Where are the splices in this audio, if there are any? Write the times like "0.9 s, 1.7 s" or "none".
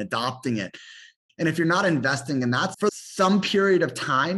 1.1 s, 2.7 s